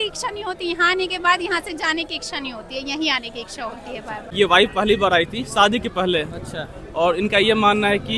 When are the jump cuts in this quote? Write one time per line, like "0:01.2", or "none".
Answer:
0:04.2